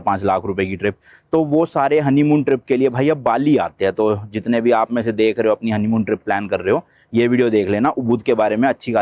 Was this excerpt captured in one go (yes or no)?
yes